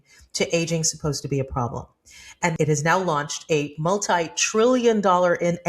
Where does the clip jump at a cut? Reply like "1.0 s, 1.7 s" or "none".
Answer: 2.5 s